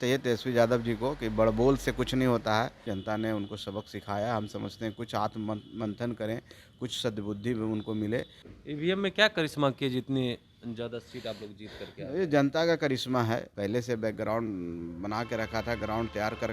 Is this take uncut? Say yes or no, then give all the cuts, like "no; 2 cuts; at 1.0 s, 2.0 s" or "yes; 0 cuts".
no; 3 cuts; at 2.9 s, 8.4 s, 13.5 s